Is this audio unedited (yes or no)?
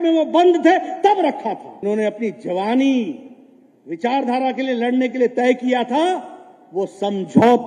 no